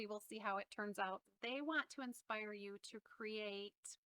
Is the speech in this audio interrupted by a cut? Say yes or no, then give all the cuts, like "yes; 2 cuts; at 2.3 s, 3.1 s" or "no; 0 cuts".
yes; 1 cut; at 1.2 s